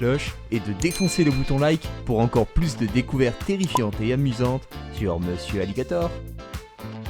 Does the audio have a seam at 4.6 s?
no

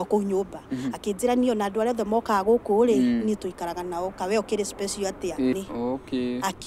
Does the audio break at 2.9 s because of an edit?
no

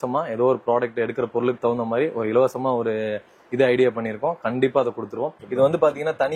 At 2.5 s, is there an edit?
no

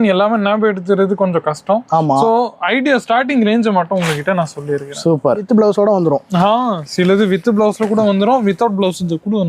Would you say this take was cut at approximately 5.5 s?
yes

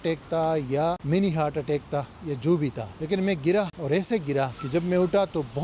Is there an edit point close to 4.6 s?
yes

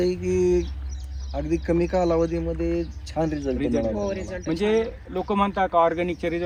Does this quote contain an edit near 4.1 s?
no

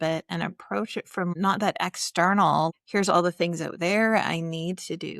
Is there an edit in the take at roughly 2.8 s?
yes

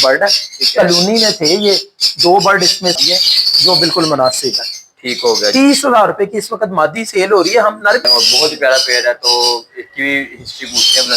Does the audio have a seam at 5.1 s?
no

